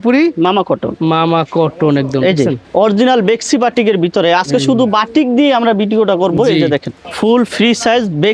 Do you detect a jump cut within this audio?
yes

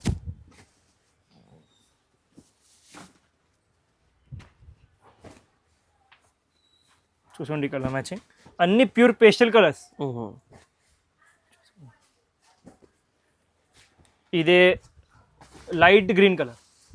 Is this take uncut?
yes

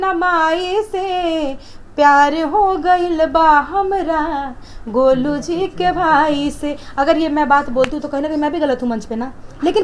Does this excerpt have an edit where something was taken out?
no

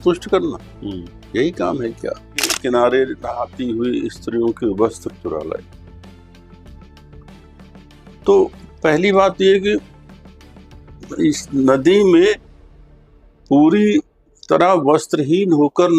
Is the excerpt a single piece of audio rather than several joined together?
no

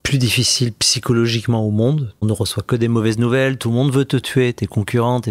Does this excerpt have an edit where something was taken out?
yes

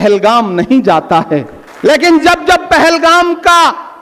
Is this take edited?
no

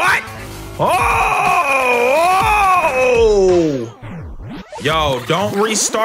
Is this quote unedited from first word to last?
yes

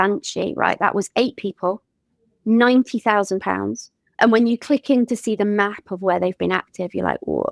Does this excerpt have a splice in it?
no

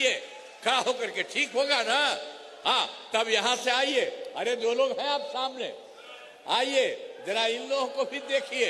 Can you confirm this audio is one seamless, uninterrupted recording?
yes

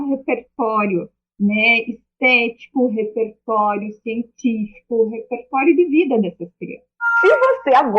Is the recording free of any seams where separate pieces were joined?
no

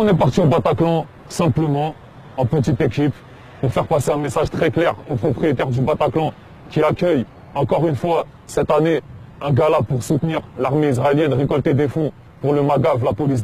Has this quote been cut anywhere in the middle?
yes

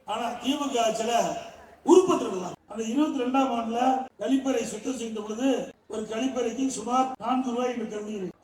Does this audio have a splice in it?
yes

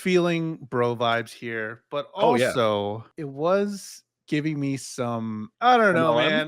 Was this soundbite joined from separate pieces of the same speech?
yes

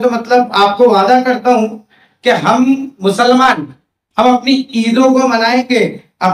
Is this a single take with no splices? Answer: yes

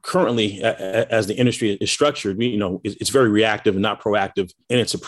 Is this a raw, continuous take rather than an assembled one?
no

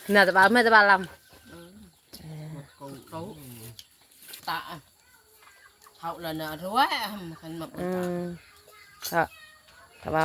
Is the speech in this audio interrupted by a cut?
yes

